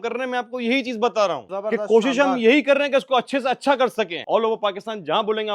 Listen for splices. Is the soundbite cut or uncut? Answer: cut